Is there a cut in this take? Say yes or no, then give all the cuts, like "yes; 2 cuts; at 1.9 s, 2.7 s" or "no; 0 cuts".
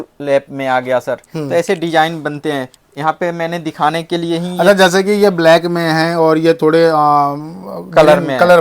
no; 0 cuts